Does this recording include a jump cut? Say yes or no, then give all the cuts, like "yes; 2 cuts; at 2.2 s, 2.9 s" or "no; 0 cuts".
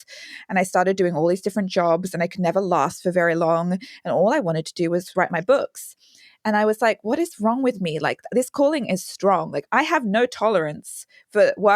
yes; 2 cuts; at 5.1 s, 9.6 s